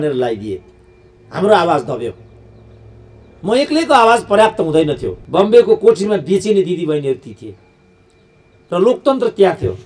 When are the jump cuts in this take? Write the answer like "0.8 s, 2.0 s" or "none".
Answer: 5.1 s